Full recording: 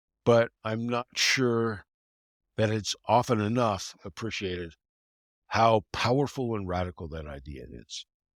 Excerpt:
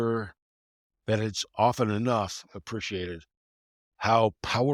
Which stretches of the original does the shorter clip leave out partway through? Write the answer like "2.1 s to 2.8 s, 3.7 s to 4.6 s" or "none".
none